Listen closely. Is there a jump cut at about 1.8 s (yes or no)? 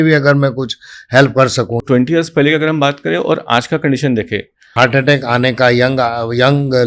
yes